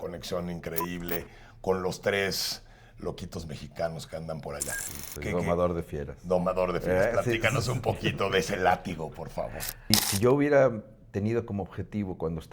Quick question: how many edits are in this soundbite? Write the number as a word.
one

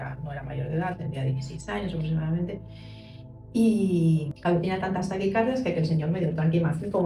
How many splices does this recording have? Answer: one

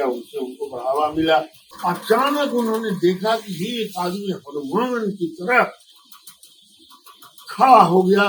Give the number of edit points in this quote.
one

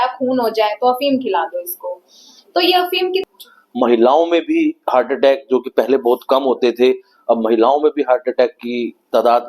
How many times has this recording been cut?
one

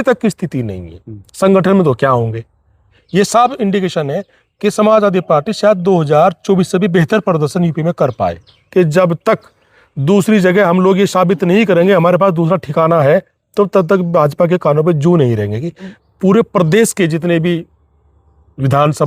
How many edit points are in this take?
three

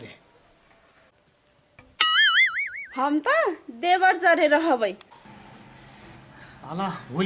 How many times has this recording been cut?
one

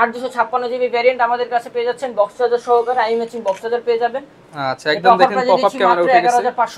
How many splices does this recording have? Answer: zero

